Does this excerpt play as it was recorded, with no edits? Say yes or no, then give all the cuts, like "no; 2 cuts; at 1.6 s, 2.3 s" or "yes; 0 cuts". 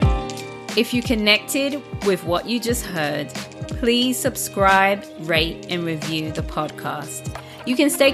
yes; 0 cuts